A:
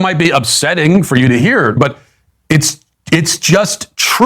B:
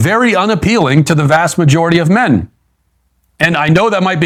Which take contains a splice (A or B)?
A